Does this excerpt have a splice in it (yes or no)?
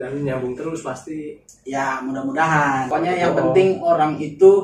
yes